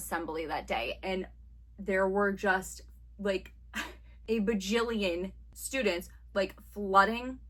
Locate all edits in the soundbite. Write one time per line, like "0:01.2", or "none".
none